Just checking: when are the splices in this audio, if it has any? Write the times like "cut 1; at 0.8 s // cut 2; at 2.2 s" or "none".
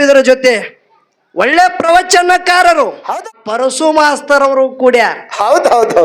cut 1; at 3.1 s